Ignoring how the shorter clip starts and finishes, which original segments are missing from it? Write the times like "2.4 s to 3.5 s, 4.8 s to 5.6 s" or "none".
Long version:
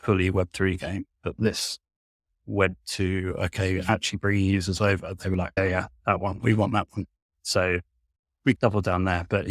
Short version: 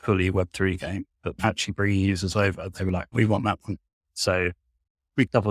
1.4 s to 3.8 s, 5.5 s to 6.3 s